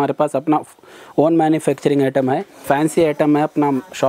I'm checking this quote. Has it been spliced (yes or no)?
yes